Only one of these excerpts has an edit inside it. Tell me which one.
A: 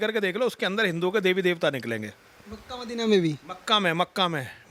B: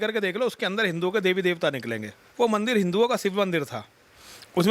B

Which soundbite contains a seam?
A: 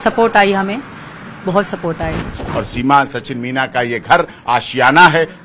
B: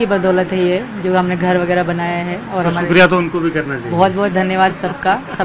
A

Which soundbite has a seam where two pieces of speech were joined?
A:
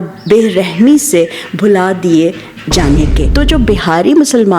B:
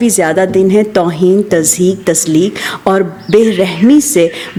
A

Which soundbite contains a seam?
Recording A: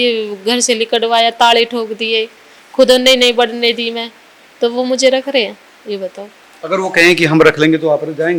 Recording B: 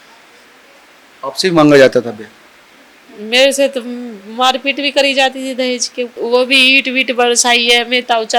B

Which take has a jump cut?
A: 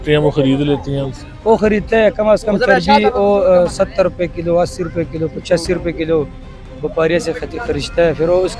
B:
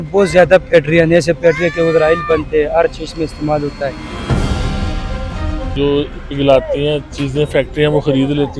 B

